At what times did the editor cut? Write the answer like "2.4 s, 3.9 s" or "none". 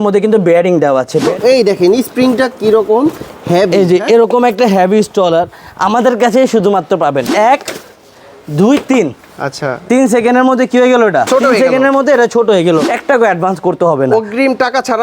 1.3 s, 7.3 s, 11.3 s, 12.9 s